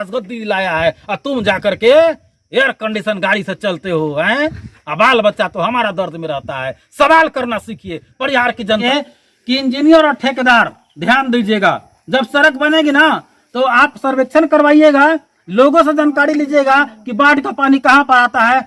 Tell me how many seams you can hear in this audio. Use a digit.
1